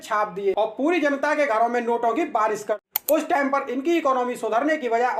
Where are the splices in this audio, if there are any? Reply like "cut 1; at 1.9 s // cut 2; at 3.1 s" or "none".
cut 1; at 2.8 s

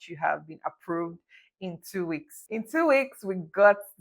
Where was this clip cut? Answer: cut 1; at 2.4 s

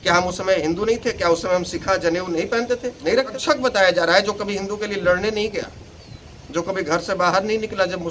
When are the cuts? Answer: cut 1; at 3.4 s

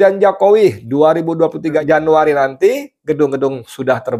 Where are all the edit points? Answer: cut 1; at 1.8 s

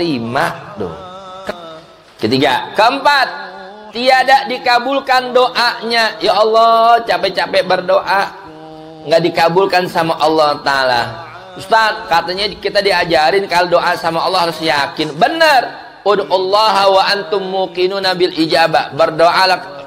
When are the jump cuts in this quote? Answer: cut 1; at 1.5 s

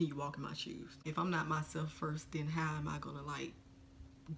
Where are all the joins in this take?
cut 1; at 1.0 s

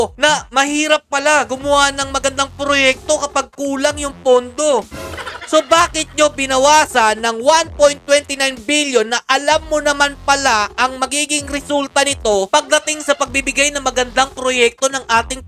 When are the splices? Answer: none

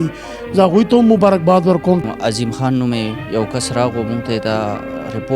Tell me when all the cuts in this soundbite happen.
cut 1; at 2.1 s

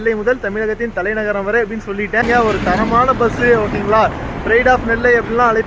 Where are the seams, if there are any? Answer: cut 1; at 2.2 s

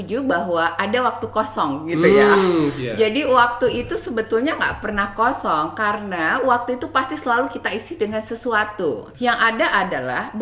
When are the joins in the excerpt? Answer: cut 1; at 9.1 s

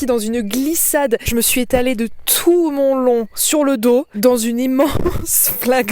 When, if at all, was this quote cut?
cut 1; at 1.3 s

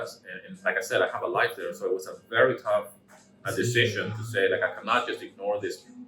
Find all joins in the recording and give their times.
none

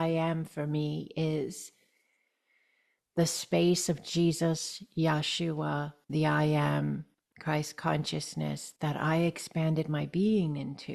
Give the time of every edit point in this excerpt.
cut 1; at 6.0 s

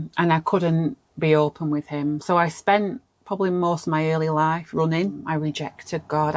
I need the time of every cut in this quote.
cut 1; at 5.2 s

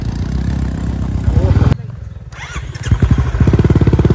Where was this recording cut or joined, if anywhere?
cut 1; at 1.7 s

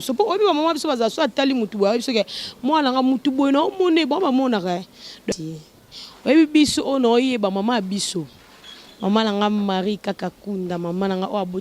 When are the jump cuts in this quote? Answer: cut 1; at 5.3 s

